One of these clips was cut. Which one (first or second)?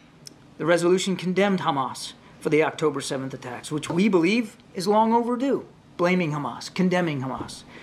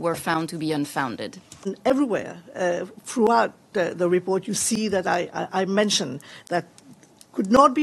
second